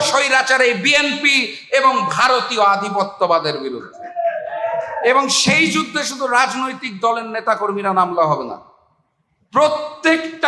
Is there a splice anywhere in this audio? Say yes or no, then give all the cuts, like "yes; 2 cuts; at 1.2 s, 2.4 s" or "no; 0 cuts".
no; 0 cuts